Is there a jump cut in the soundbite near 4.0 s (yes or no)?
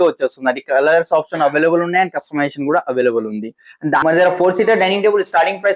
yes